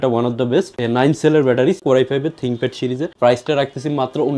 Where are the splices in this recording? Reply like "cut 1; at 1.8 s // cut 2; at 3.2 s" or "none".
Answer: cut 1; at 1.8 s // cut 2; at 3.1 s